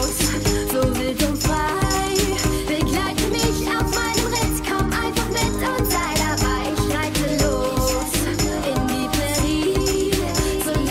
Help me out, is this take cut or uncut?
uncut